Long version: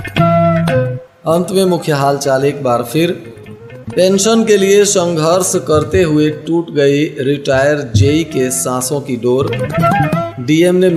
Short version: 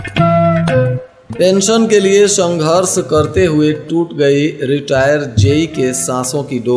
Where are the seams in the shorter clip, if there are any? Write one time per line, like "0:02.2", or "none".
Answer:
0:01.1